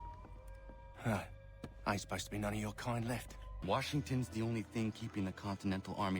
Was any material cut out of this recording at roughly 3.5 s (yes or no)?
yes